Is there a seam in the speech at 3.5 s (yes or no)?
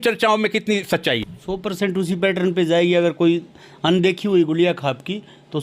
no